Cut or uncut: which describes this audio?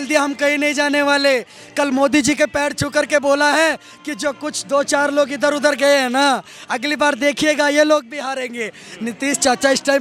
uncut